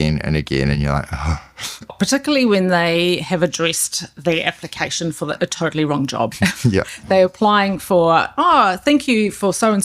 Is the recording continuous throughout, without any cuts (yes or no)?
no